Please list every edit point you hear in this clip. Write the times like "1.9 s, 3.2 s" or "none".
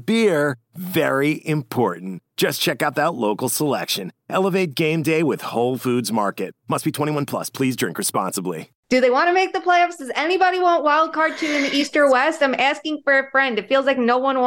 8.7 s